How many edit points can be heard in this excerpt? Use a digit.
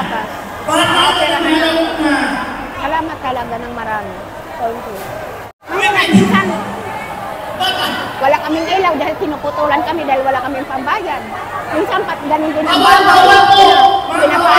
1